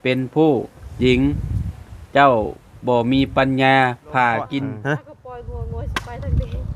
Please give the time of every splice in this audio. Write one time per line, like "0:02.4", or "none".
0:04.8